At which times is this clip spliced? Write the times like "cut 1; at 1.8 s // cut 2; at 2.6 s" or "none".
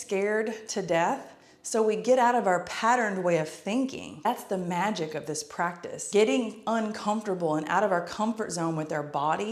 none